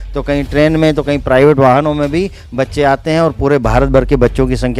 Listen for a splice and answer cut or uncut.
uncut